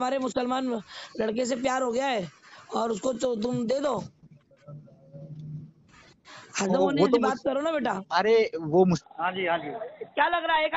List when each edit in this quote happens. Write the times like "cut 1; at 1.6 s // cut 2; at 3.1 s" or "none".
cut 1; at 9.0 s

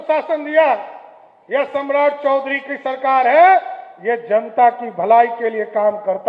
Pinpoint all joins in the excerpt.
none

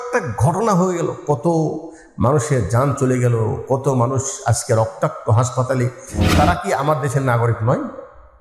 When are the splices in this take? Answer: cut 1; at 6.2 s

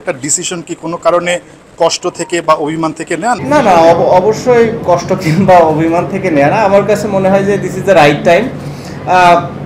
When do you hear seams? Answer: cut 1; at 3.4 s

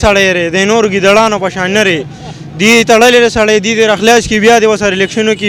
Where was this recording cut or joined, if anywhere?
none

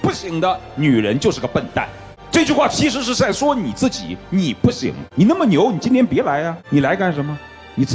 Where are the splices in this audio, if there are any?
cut 1; at 5.0 s // cut 2; at 6.6 s

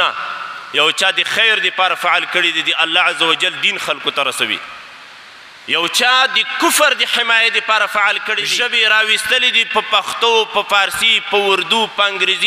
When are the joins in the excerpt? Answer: cut 1; at 8.5 s

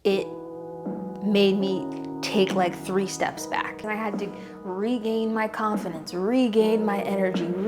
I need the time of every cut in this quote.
cut 1; at 3.8 s

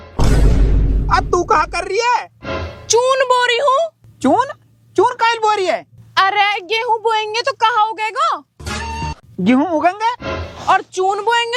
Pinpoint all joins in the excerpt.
none

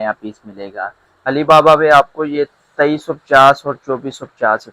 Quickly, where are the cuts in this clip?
cut 1; at 1.3 s

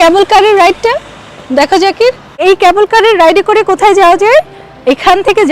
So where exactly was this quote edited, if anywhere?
cut 1; at 2.3 s

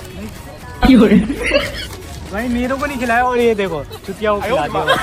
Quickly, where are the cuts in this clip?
none

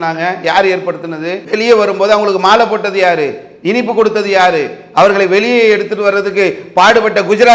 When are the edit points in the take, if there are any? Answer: cut 1; at 1.4 s

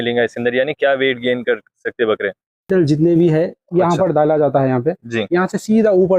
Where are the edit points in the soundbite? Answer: cut 1; at 2.7 s

